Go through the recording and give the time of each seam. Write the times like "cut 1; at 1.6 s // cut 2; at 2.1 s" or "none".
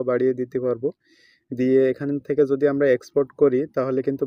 none